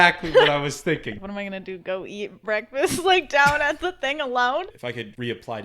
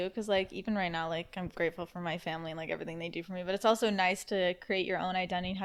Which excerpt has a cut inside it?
first; 2 cuts; at 1.1 s, 4.7 s

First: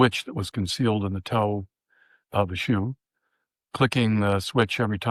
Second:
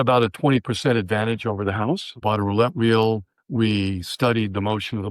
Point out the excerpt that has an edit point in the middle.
second; 2 cuts; at 2.1 s, 3.4 s

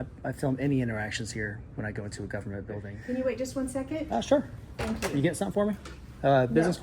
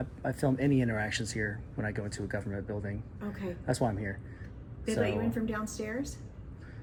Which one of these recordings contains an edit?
first; 1 cut; at 2.9 s

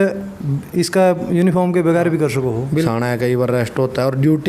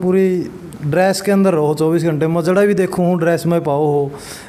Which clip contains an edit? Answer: first; 1 cut; at 2.9 s

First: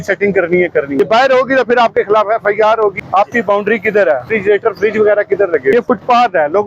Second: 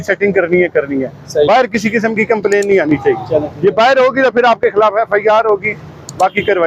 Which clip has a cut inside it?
first; 4 cuts; at 1.0 s, 3.0 s, 4.3 s, 5.7 s

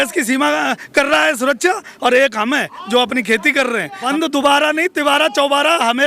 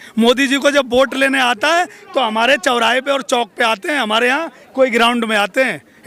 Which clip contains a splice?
first; 1 cut; at 4.1 s

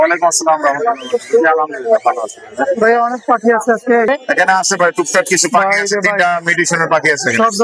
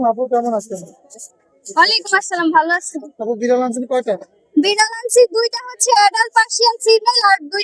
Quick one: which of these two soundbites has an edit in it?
first; 1 cut; at 4.1 s

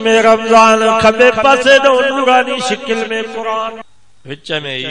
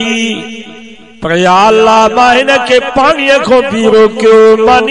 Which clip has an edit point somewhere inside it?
first; 1 cut; at 3.8 s

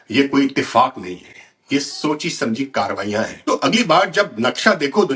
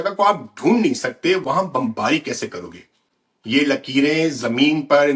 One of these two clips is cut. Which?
first; 1 cut; at 3.4 s

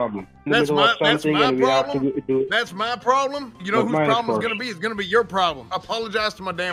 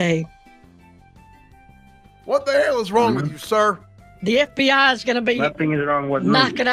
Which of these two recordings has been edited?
first; 1 cut; at 5.6 s

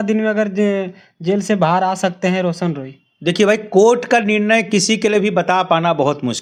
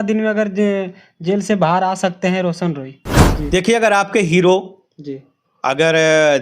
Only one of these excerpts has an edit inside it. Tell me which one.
second; 1 cut; at 3.1 s

